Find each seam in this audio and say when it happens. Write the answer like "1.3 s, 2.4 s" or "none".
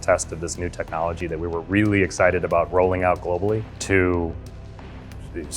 3.7 s